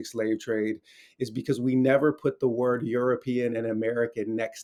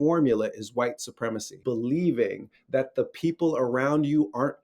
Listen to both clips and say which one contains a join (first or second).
second